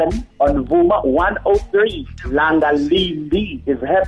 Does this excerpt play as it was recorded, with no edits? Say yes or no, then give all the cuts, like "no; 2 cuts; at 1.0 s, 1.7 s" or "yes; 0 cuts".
yes; 0 cuts